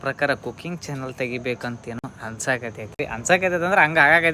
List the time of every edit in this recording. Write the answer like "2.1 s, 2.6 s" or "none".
none